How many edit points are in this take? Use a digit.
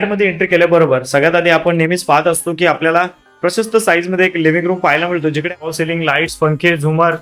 1